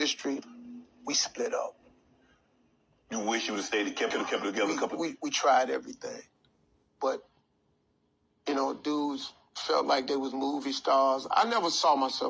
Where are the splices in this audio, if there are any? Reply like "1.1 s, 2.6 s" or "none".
4.1 s